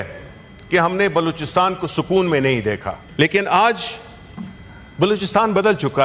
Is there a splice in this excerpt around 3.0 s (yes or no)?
yes